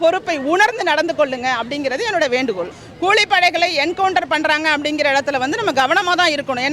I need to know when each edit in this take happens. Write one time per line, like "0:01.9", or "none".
0:02.8